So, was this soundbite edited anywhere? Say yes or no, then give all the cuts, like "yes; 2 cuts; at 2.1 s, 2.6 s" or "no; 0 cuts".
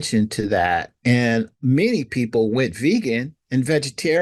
no; 0 cuts